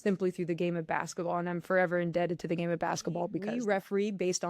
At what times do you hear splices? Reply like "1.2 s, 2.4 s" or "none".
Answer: 3.5 s

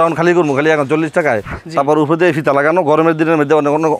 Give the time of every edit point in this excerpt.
1.5 s

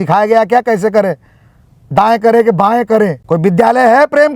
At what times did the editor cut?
3.2 s

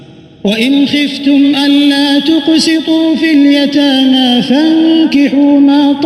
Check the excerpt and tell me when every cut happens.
none

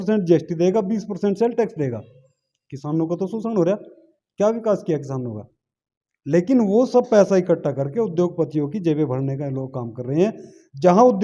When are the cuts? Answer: none

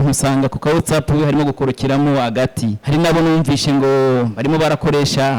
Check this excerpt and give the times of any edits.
2.8 s

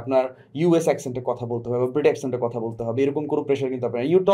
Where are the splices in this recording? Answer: none

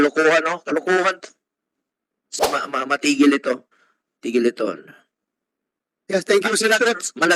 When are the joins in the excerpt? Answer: 2.3 s

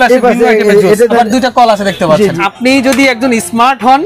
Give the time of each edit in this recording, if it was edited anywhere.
1.1 s, 2.4 s

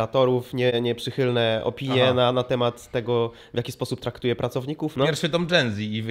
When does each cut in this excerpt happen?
4.9 s

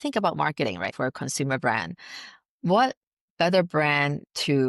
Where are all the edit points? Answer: 0.9 s

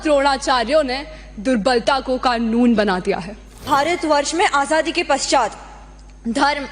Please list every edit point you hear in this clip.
3.6 s

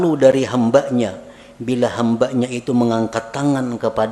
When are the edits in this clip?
none

